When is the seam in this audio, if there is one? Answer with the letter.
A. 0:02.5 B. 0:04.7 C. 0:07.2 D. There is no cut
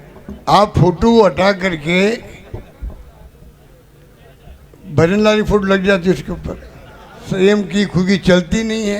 C